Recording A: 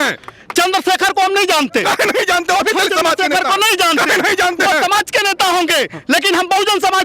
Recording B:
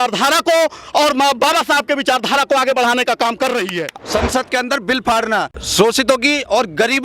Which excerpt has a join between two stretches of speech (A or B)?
B